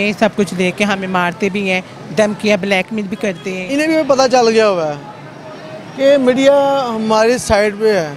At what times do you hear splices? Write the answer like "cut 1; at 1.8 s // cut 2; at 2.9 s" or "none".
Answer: cut 1; at 3.5 s